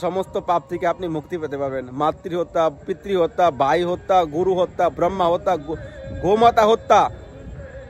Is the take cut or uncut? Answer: uncut